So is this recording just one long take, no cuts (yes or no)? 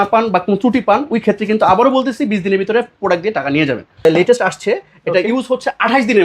no